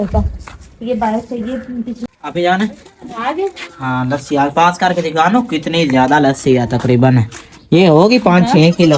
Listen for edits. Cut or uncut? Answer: cut